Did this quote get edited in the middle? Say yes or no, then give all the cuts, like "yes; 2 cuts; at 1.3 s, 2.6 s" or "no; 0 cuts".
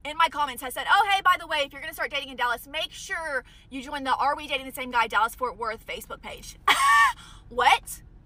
no; 0 cuts